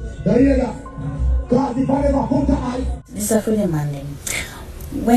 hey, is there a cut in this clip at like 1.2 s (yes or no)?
no